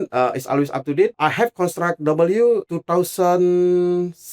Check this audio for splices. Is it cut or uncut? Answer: cut